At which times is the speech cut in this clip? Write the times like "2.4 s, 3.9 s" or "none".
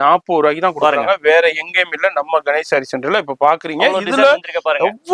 none